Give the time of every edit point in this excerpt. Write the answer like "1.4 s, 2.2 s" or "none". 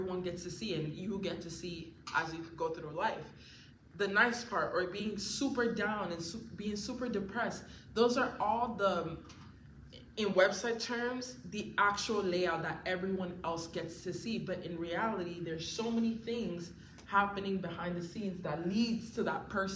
none